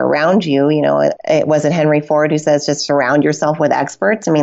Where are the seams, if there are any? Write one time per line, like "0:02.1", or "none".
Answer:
0:01.2